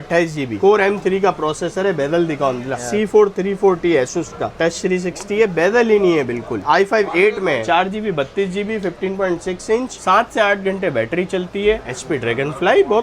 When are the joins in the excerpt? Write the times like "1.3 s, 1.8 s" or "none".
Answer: 2.8 s, 4.5 s, 6.6 s, 7.6 s, 11.8 s